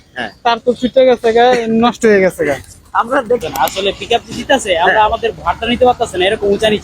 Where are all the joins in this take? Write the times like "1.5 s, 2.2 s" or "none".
3.4 s